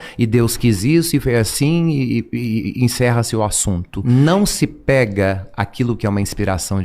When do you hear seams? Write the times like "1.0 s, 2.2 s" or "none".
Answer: 4.0 s

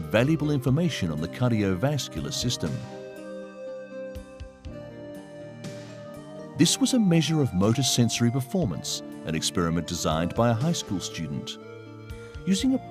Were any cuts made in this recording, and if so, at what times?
11.7 s

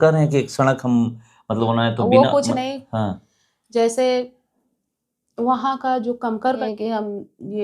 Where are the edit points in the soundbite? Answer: 6.6 s

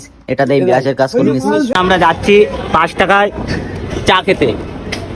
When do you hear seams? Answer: 1.7 s

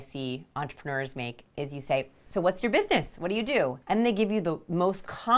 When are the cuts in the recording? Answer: 3.8 s

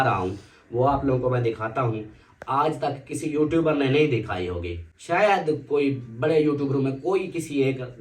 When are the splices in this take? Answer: none

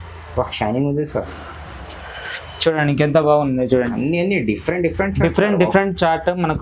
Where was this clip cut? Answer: none

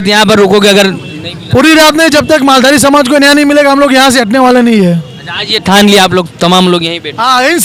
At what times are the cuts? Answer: none

